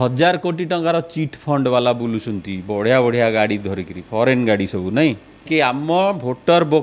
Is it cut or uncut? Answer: cut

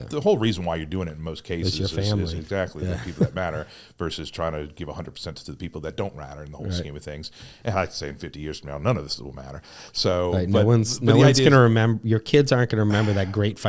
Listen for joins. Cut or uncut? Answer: uncut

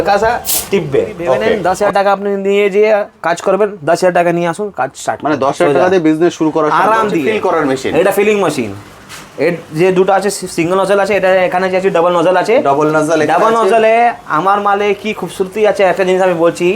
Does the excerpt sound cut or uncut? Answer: cut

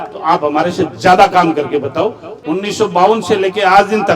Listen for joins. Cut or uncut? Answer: cut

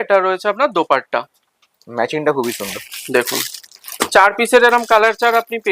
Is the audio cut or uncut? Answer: uncut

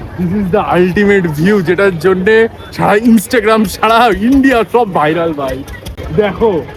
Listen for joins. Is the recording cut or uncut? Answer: uncut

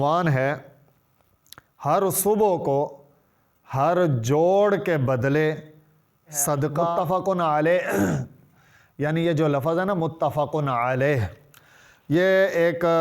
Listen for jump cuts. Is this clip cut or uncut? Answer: cut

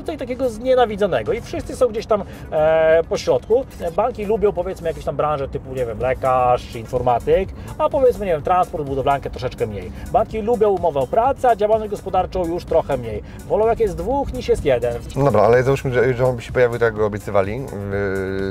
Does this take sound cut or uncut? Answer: cut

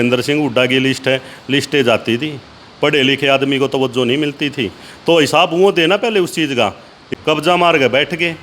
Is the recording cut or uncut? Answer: cut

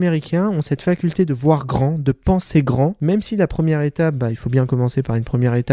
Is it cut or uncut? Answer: cut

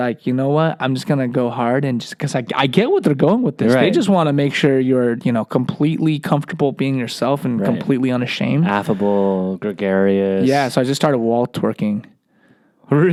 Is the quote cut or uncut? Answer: uncut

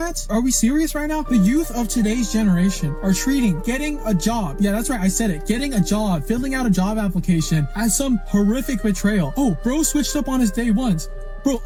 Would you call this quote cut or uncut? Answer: uncut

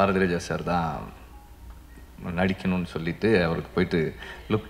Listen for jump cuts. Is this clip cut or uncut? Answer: uncut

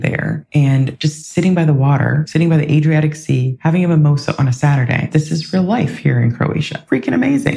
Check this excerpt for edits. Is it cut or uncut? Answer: cut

